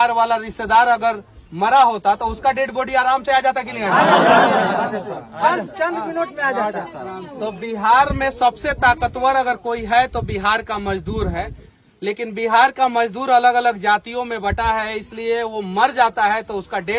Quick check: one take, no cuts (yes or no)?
yes